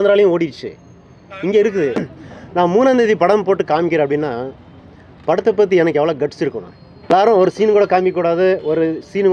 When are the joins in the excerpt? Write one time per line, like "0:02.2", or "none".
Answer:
0:02.0
0:07.1